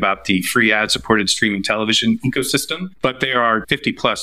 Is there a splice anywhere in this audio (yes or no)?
yes